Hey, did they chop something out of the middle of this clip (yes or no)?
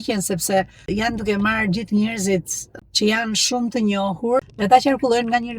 yes